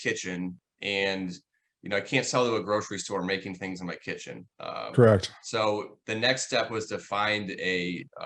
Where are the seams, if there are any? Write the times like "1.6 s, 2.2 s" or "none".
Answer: none